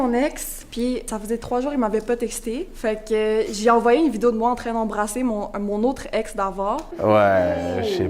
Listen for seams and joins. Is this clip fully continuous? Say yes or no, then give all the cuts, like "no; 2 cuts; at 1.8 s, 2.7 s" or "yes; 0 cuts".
no; 3 cuts; at 0.9 s, 2.7 s, 6.9 s